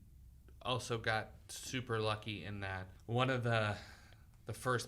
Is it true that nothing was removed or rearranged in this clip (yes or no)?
no